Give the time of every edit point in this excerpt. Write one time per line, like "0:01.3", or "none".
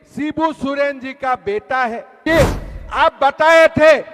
0:02.2